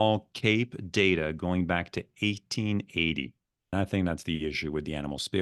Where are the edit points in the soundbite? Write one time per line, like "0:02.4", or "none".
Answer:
0:03.7